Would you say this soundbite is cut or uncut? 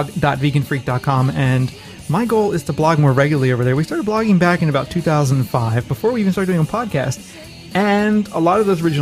cut